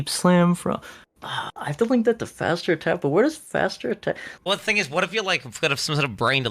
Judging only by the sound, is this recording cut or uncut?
cut